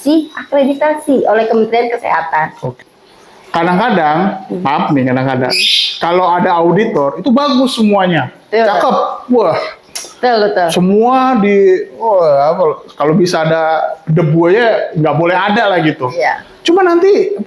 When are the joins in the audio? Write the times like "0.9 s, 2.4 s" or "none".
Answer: 2.7 s